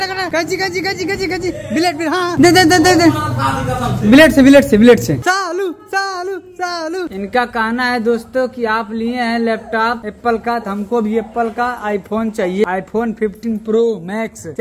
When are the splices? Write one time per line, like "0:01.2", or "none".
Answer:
0:05.2
0:07.1